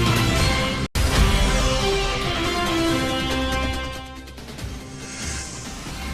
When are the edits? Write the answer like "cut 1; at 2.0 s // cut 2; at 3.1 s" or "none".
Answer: cut 1; at 0.9 s // cut 2; at 4.8 s